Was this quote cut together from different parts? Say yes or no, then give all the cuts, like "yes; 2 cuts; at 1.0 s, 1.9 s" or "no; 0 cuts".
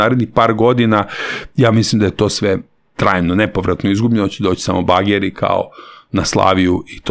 no; 0 cuts